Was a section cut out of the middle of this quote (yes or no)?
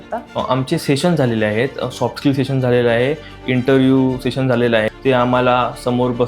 yes